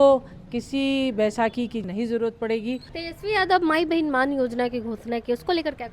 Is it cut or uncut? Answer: cut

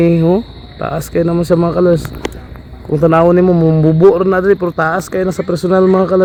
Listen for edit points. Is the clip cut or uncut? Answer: uncut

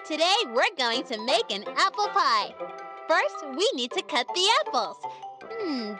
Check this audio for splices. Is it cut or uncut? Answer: cut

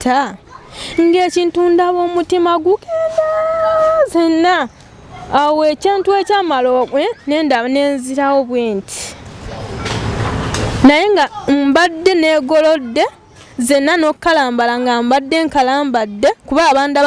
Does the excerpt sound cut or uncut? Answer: uncut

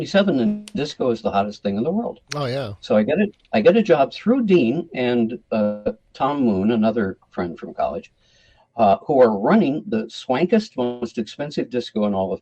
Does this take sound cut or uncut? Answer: uncut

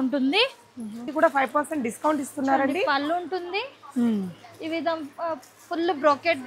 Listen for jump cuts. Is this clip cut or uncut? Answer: cut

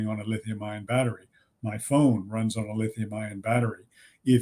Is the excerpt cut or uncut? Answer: uncut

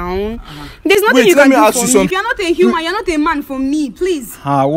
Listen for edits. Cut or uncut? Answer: cut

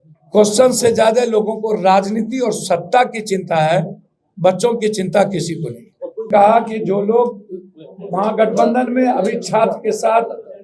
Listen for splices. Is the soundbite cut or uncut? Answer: cut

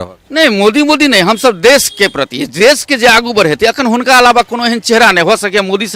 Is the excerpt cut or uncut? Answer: uncut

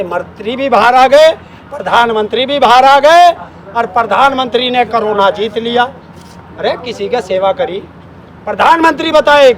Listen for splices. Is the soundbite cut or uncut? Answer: uncut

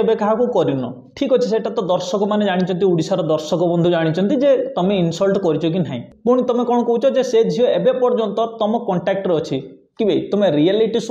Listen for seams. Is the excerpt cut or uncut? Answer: cut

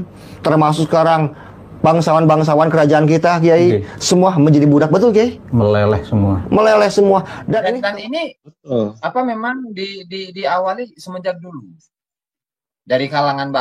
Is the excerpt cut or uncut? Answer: cut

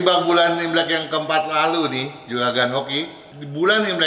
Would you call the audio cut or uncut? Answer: uncut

